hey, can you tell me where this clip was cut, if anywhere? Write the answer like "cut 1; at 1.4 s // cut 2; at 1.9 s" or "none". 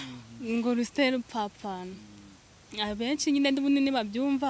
none